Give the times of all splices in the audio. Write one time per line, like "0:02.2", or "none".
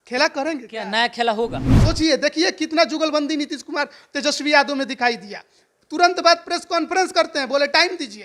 0:01.7